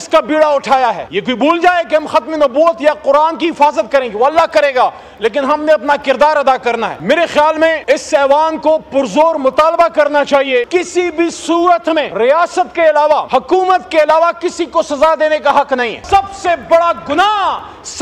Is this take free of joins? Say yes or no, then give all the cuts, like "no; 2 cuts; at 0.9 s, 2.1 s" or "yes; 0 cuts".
no; 7 cuts; at 1.1 s, 7.0 s, 7.8 s, 10.7 s, 12.1 s, 13.2 s, 16.0 s